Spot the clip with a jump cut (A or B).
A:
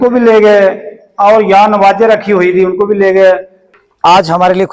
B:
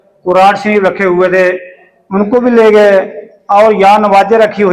A